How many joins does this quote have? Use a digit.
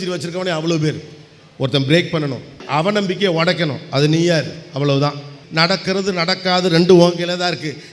2